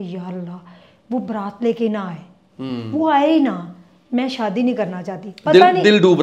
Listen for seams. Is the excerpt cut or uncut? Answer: uncut